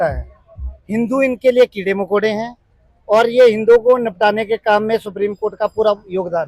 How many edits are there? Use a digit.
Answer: 0